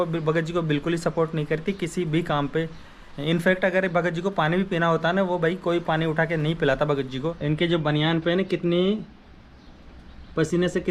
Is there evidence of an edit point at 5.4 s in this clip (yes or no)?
no